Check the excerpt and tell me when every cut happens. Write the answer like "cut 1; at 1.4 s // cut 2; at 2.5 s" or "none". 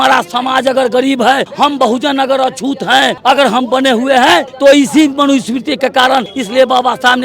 cut 1; at 1.5 s // cut 2; at 3.2 s // cut 3; at 4.5 s // cut 4; at 6.4 s